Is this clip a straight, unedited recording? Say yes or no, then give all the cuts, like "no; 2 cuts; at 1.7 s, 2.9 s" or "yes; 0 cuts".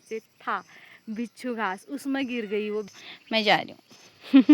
no; 1 cut; at 2.9 s